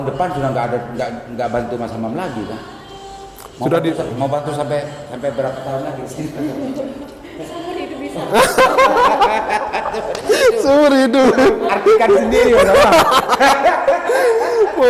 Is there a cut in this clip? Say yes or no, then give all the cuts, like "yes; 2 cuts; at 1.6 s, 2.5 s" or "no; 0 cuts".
no; 0 cuts